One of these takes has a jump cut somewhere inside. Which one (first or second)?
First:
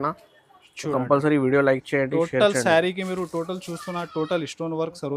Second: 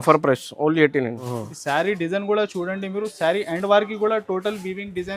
second